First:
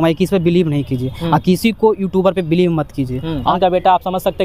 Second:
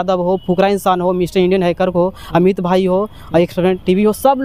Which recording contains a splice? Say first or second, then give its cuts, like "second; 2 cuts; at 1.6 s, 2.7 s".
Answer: first; 1 cut; at 3.5 s